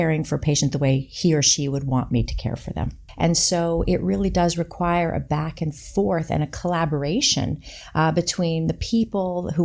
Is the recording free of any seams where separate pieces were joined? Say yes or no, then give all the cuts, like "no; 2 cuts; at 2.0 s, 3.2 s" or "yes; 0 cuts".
no; 1 cut; at 3.0 s